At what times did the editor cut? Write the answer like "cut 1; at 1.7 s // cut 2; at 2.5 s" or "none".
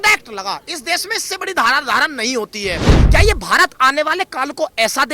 cut 1; at 3.0 s